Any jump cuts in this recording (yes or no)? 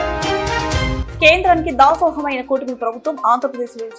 yes